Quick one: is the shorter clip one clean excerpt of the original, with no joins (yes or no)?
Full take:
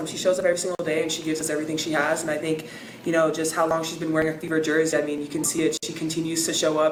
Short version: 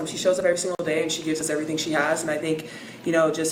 yes